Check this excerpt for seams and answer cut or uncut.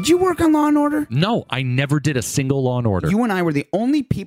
cut